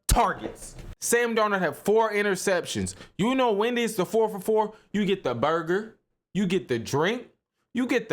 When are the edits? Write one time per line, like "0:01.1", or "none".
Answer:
0:00.9